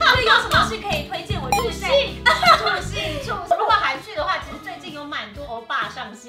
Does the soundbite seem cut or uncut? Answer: cut